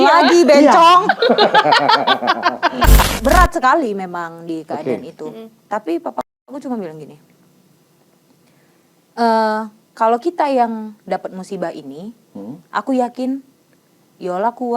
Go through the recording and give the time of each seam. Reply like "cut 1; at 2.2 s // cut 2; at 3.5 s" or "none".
cut 1; at 3.0 s